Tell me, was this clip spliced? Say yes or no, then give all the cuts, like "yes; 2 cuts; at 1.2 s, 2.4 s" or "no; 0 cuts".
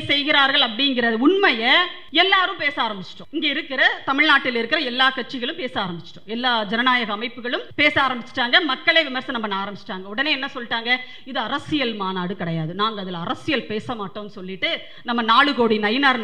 yes; 3 cuts; at 2.0 s, 3.1 s, 7.7 s